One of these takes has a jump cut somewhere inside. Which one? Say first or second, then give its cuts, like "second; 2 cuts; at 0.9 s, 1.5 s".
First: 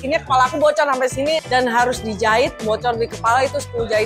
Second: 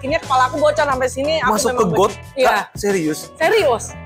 first; 1 cut; at 1.4 s